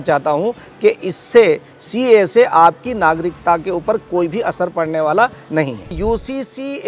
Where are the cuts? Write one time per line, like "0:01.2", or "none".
0:06.0